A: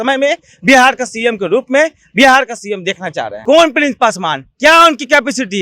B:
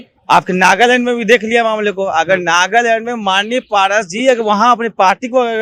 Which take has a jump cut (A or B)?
A